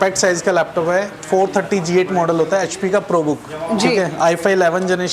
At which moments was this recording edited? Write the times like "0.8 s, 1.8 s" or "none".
none